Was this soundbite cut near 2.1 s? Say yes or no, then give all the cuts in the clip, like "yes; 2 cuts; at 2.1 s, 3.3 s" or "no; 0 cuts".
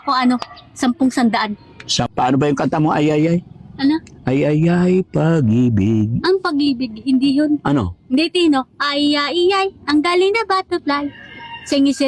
yes; 1 cut; at 2.1 s